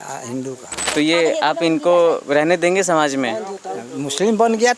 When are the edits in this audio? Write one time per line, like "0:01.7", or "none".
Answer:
0:00.9